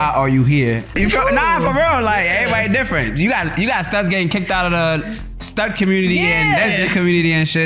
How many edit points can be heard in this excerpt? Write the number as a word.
one